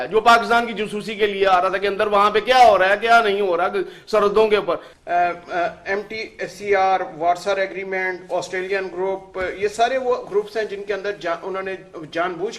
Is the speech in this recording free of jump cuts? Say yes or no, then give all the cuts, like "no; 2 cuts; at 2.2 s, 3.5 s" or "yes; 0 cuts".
no; 1 cut; at 4.9 s